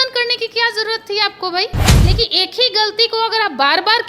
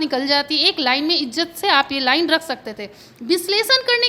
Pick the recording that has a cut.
first; 1 cut; at 1.9 s

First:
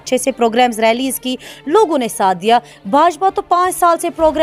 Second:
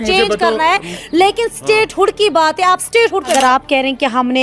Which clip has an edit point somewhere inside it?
second; 1 cut; at 3.3 s

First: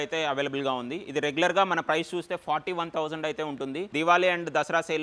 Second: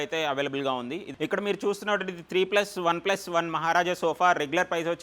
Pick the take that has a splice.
second; 1 cut; at 1.0 s

